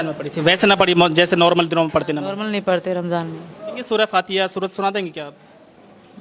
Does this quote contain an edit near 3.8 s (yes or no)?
yes